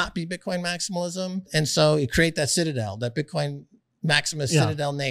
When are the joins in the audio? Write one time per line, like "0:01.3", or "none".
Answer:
0:01.5